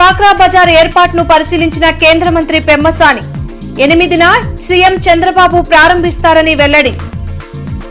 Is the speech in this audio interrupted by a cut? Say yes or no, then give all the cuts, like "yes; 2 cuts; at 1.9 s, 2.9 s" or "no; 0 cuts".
no; 0 cuts